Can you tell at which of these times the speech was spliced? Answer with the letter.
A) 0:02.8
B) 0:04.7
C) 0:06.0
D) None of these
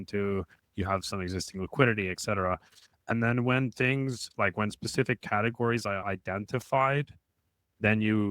C